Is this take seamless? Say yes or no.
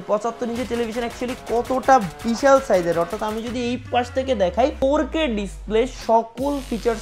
yes